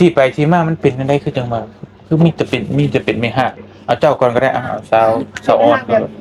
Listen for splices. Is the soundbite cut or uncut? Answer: uncut